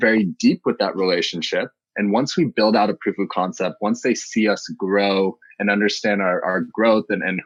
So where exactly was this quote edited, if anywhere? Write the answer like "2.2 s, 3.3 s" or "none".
none